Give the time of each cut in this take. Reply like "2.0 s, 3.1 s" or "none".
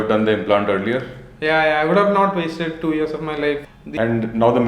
3.8 s